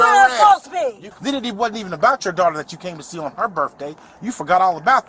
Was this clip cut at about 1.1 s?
yes; 1 cut; at 1.1 s

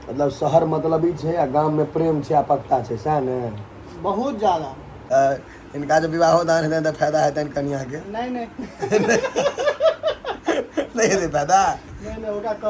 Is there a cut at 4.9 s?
yes; 1 cut; at 4.9 s

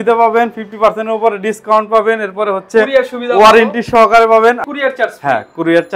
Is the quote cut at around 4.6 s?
yes; 1 cut; at 4.6 s

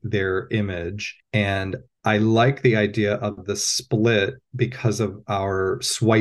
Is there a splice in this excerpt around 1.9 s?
yes; 2 cuts; at 1.1 s, 1.9 s

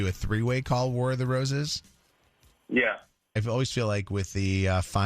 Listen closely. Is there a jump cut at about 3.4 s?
yes; 1 cut; at 3.4 s

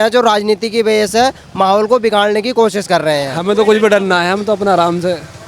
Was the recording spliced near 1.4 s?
no; 1 cut; at 3.3 s

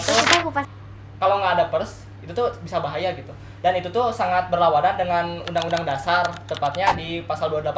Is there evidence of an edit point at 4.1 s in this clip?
no; 0 cuts

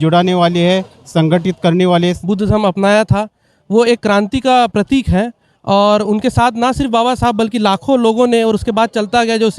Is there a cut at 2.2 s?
yes; 1 cut; at 2.2 s

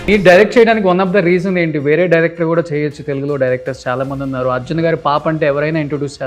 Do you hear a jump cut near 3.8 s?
no; 0 cuts

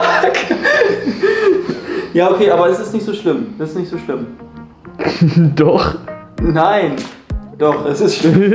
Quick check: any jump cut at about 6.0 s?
no; 0 cuts

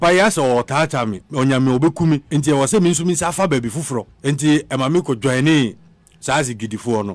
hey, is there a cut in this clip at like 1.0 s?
no; 2 cuts; at 2.3 s, 4.1 s

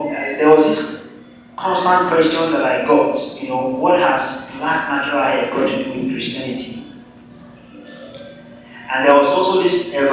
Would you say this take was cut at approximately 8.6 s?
no; 0 cuts

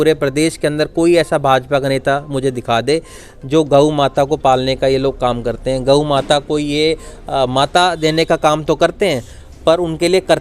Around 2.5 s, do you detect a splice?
no; 0 cuts

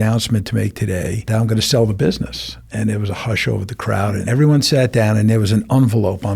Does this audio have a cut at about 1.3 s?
yes; 2 cuts; at 1.3 s, 4.2 s

